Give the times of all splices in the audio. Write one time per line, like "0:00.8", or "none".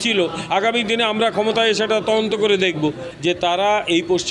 0:03.0